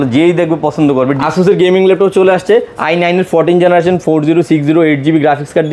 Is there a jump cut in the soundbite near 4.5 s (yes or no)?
no